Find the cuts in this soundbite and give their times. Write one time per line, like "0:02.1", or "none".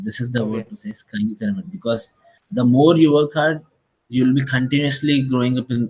none